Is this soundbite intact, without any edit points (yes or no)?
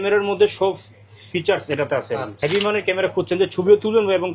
no